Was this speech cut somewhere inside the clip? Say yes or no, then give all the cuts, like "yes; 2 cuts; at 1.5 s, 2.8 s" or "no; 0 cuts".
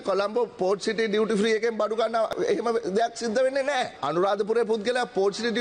yes; 2 cuts; at 2.3 s, 4.0 s